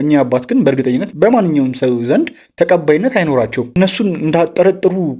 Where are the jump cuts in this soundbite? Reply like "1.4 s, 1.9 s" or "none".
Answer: 3.7 s